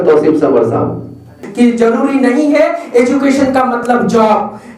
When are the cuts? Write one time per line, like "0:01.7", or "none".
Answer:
0:01.4

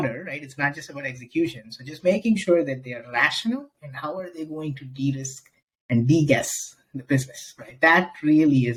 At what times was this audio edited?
none

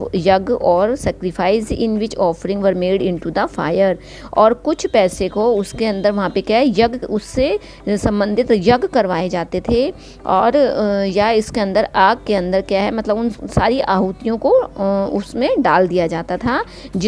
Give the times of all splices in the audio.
none

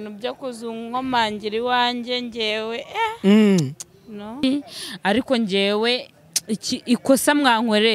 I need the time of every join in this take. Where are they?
0:04.4

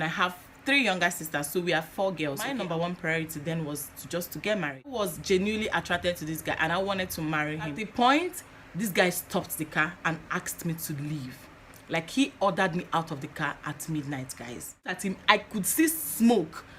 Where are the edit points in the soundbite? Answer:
0:02.5
0:05.0
0:07.8
0:15.0

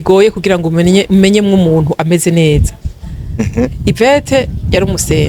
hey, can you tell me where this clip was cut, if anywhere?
none

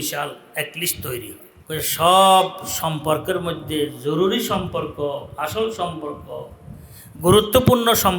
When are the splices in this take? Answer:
0:01.5

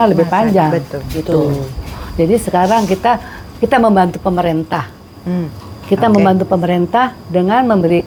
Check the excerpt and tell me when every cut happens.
none

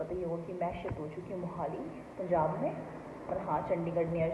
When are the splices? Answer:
none

